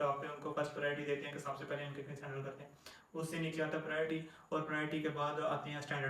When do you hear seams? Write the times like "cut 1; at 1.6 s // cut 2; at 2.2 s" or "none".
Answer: none